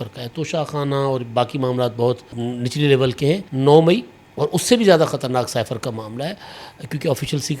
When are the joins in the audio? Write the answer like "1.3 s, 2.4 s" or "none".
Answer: 2.3 s, 3.5 s